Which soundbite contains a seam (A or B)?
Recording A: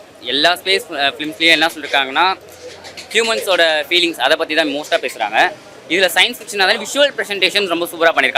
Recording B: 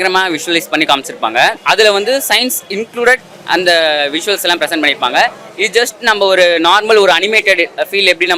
B